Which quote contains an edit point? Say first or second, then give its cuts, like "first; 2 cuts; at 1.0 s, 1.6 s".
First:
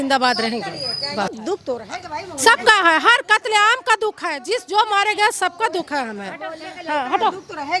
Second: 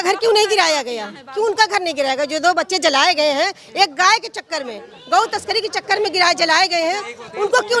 first; 1 cut; at 1.3 s